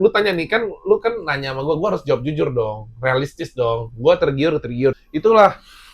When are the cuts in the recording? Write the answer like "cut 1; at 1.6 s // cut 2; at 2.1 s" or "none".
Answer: cut 1; at 5.0 s

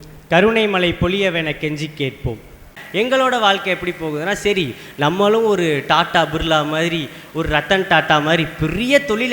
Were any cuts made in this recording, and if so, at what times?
cut 1; at 2.8 s

